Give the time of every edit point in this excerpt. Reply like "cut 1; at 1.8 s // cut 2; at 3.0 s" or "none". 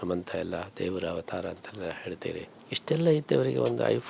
cut 1; at 2.6 s